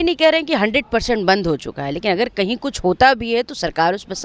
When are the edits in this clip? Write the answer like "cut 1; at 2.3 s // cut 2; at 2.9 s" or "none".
none